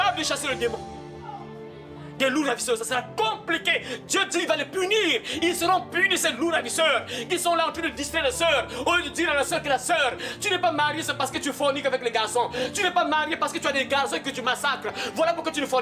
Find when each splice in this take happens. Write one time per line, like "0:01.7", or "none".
none

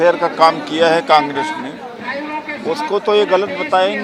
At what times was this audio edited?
none

